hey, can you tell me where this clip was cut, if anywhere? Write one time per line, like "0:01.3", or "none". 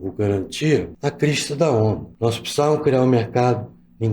0:00.9
0:02.1

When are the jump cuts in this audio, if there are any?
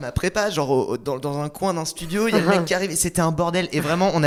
none

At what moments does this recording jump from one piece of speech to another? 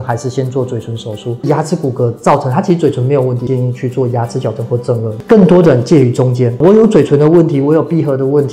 0:01.4
0:03.4
0:05.2
0:06.5

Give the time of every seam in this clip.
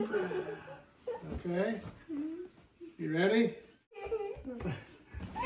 0:04.0

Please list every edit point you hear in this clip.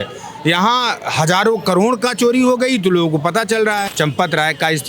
0:03.9

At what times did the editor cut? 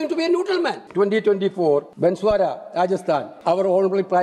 0:00.8
0:01.9
0:03.3

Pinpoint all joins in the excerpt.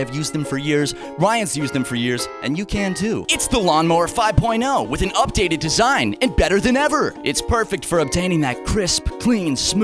0:03.2

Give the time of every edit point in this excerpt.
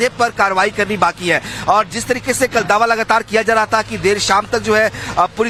none

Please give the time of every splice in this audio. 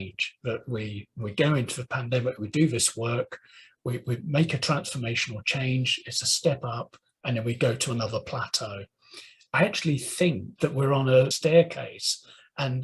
0:10.5

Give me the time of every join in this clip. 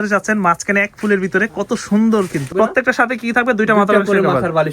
0:02.5

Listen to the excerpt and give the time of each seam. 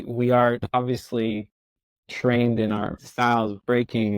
0:03.0

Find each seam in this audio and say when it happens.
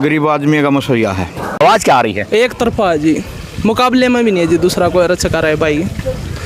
0:01.6

